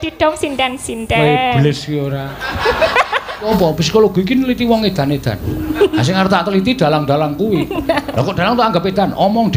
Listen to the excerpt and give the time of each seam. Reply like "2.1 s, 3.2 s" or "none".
3.5 s